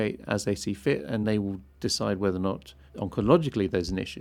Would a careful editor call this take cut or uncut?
cut